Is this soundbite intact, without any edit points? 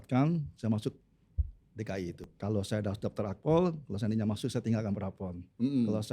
no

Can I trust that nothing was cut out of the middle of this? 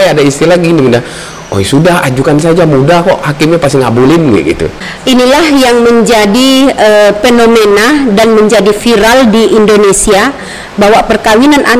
no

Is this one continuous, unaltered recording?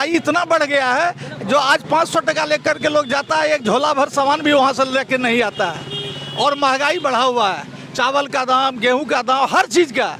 yes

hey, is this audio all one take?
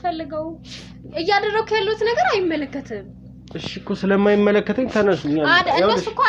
yes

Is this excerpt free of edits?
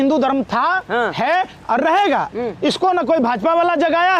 yes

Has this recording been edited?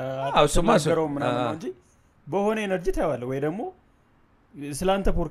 no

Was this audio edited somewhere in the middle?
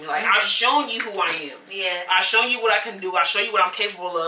no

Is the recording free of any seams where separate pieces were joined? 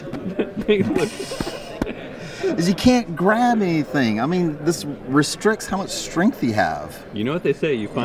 yes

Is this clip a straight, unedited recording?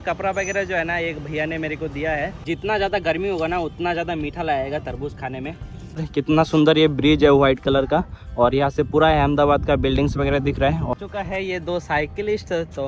no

